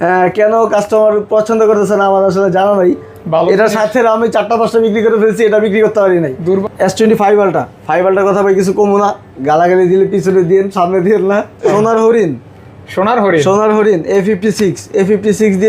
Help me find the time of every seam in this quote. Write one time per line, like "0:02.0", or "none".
0:06.6
0:11.7